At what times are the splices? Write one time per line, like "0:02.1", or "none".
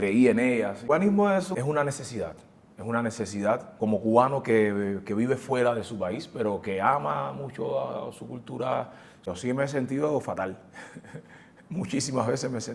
0:01.3
0:03.7
0:09.3